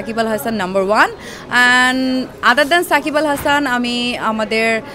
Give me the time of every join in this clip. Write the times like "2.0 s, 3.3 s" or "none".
none